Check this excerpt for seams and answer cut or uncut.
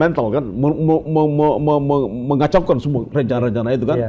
uncut